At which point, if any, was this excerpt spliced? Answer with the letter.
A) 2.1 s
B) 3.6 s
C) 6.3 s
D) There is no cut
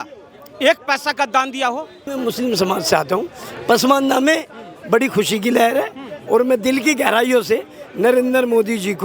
A